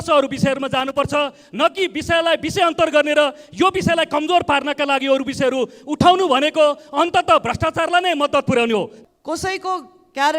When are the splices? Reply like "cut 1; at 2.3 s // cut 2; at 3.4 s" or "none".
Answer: cut 1; at 9.0 s